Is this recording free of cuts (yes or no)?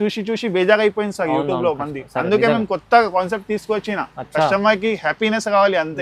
yes